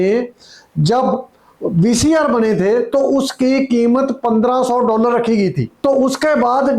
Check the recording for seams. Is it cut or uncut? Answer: cut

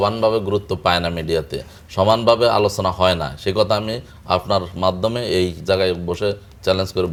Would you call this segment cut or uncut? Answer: uncut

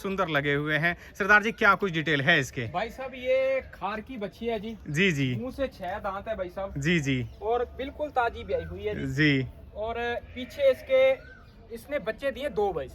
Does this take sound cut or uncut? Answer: uncut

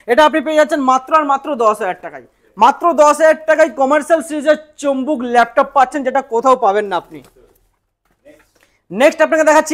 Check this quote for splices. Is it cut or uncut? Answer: uncut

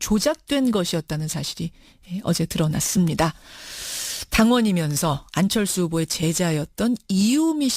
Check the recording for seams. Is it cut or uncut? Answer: cut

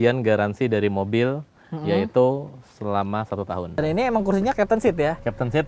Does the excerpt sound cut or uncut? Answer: cut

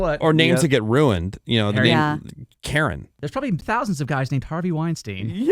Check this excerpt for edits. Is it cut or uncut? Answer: cut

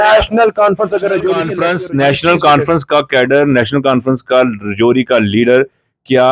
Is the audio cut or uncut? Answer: cut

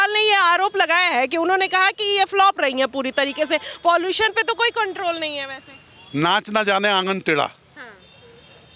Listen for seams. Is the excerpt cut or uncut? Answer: uncut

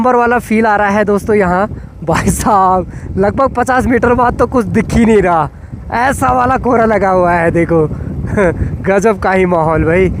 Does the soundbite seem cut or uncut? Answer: uncut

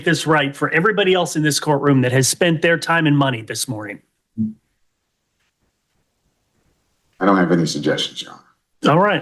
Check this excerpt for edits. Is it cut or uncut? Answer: cut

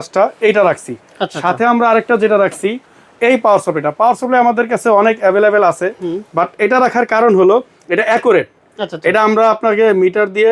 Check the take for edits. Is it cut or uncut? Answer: uncut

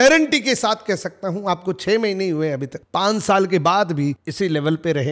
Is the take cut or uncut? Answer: uncut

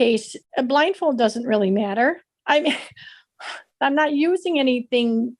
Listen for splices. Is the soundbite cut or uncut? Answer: uncut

